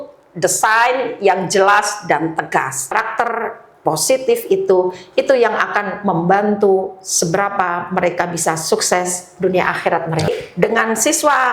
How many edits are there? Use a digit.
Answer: 2